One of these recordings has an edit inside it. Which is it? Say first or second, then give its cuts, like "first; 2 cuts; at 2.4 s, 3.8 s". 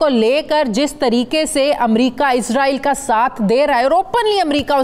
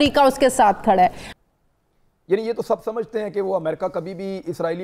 second; 1 cut; at 1.2 s